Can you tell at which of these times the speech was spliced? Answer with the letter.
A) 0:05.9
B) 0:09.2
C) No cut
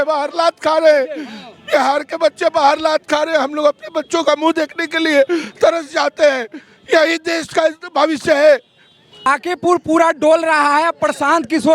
B